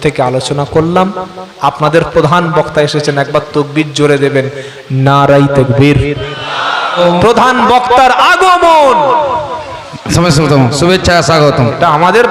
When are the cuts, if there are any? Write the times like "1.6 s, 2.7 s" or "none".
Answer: 7.0 s

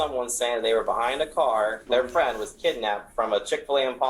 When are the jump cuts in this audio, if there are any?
1.8 s

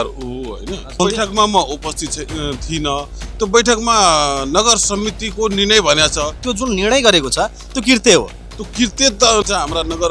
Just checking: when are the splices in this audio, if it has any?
1.0 s, 6.4 s, 9.4 s

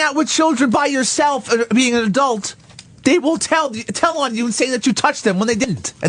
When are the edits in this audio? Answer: 2.4 s

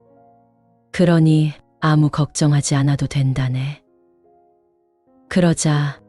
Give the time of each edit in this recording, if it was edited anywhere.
3.8 s, 5.1 s

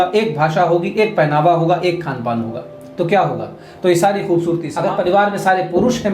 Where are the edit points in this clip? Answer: 4.7 s

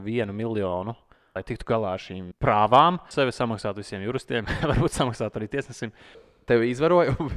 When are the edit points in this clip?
1.4 s, 2.2 s, 3.1 s, 6.3 s

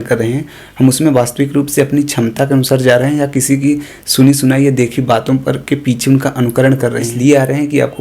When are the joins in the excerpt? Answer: 7.1 s

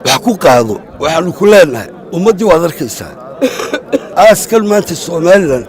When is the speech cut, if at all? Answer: 0.9 s, 4.1 s

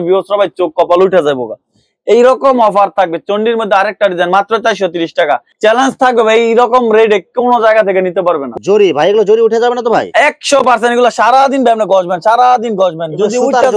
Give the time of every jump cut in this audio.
5.5 s, 8.5 s

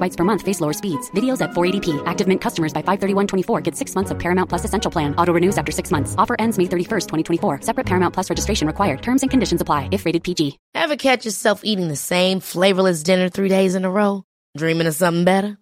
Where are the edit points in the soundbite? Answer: 10.6 s

